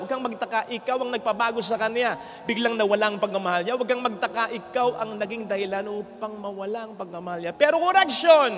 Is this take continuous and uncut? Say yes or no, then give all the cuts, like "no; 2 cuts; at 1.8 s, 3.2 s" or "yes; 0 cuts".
yes; 0 cuts